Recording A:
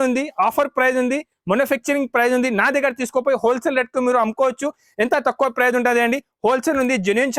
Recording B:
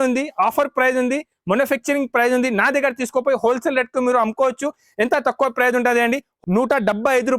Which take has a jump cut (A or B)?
B